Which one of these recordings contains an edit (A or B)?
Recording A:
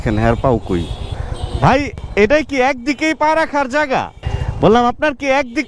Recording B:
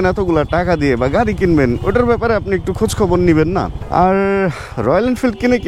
B